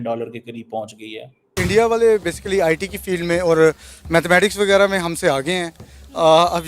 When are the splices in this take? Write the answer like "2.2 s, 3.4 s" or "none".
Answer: 1.6 s